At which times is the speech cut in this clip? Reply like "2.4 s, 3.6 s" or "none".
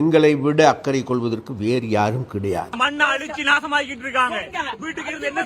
2.8 s